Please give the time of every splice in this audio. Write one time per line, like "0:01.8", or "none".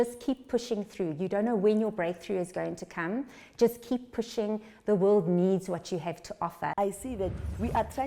0:06.7